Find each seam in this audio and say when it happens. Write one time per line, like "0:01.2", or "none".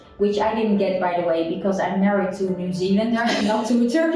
none

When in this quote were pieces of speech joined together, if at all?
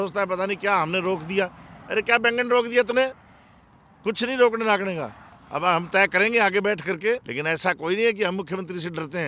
0:07.3

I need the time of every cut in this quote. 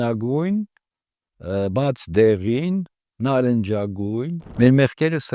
0:04.4

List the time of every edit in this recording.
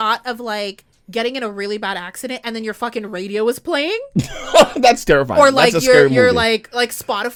none

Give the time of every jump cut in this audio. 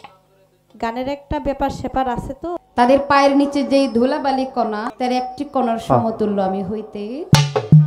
0:02.6
0:04.9

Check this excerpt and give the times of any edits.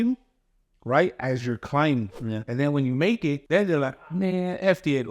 0:02.2
0:03.4

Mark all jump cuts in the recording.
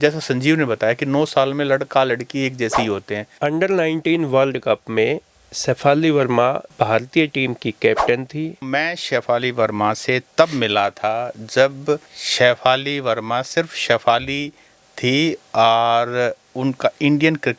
0:03.2
0:08.6

